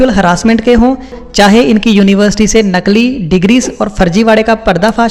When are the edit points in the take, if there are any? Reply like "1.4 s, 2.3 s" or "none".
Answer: 1.2 s